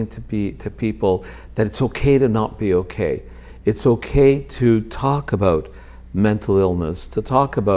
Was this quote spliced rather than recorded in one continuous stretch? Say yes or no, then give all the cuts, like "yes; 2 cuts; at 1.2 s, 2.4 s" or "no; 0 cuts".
no; 0 cuts